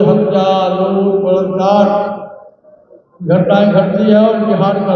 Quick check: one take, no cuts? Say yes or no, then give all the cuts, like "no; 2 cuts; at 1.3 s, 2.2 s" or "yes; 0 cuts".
yes; 0 cuts